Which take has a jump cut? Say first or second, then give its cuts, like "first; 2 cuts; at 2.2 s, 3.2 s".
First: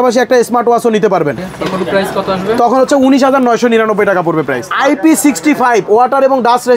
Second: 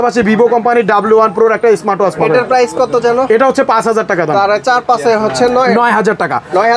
first; 1 cut; at 4.7 s